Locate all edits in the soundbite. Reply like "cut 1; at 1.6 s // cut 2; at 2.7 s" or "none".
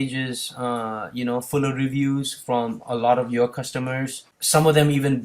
cut 1; at 4.3 s